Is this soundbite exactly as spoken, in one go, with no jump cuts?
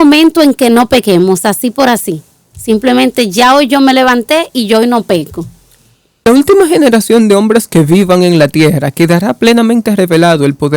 no; 1 cut; at 6.3 s

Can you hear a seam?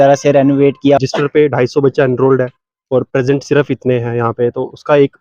yes; 1 cut; at 1.0 s

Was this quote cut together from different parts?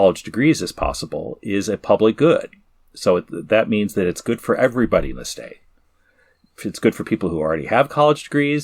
no; 0 cuts

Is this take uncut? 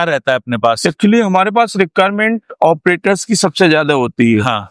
yes; 0 cuts

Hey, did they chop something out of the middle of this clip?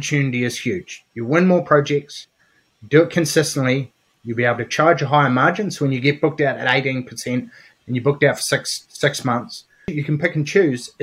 yes; 1 cut; at 10.0 s

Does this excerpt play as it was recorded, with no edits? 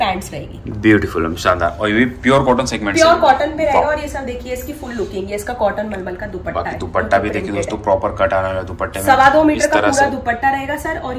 yes; 0 cuts

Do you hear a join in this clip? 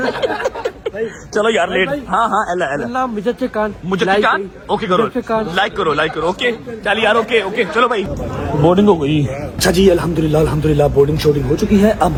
no; 0 cuts

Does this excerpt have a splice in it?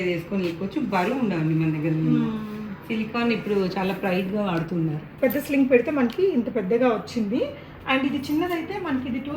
yes; 1 cut; at 5.1 s

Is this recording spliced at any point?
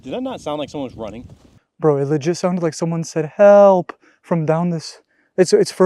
yes; 1 cut; at 1.6 s

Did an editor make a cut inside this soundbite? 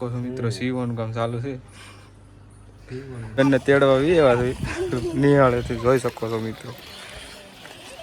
yes; 1 cut; at 3.4 s

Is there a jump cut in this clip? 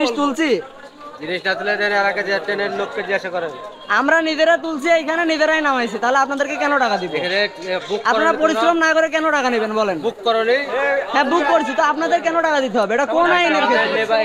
no; 0 cuts

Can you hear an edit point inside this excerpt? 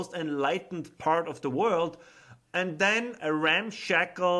yes; 1 cut; at 3.1 s

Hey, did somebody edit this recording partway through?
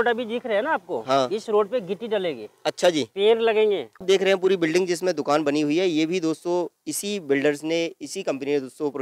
yes; 1 cut; at 3.9 s

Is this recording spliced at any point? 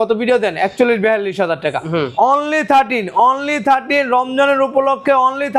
no; 0 cuts

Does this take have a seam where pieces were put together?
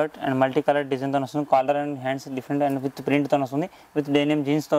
no; 0 cuts

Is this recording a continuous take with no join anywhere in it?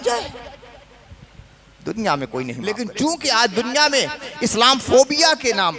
no; 1 cut; at 2.6 s

